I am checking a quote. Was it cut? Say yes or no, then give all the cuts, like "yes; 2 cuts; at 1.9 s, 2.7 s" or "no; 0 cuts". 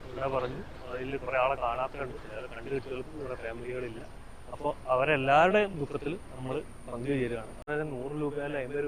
yes; 1 cut; at 7.6 s